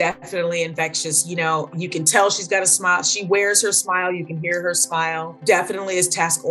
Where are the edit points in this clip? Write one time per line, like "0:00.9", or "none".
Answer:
0:01.7
0:05.3